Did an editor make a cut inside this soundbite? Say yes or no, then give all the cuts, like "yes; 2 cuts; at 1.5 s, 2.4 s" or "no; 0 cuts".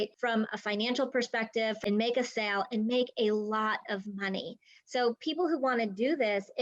yes; 1 cut; at 1.8 s